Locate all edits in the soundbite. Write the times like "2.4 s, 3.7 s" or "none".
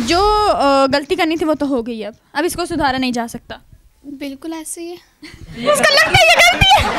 none